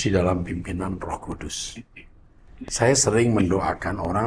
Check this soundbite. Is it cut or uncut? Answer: uncut